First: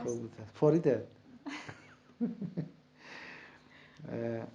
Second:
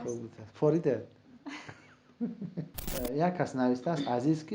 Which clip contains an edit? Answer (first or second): second